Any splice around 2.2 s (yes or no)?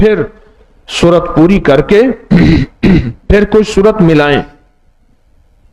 no